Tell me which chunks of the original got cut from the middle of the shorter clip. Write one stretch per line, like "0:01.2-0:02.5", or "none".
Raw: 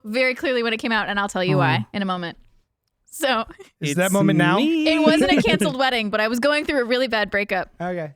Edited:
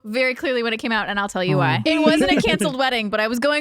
0:01.8-0:04.8